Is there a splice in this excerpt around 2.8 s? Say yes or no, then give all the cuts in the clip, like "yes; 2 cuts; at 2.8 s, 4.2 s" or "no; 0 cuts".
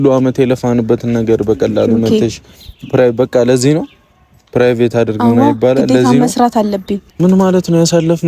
no; 1 cut; at 7.0 s